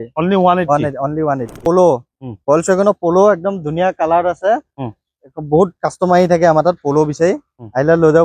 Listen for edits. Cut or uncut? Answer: cut